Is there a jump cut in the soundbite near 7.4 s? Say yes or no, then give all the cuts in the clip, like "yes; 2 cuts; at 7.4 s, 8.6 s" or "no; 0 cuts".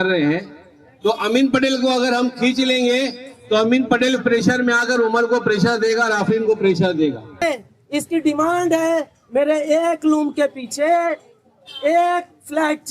yes; 1 cut; at 7.4 s